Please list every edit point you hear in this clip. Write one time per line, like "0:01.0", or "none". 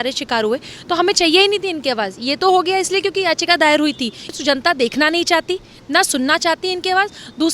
0:04.4